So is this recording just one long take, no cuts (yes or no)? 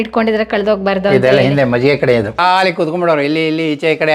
no